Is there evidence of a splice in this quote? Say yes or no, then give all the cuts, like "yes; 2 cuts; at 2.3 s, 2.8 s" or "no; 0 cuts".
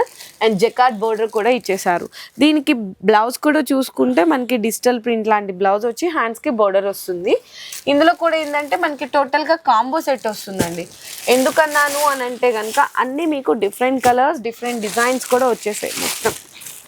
no; 0 cuts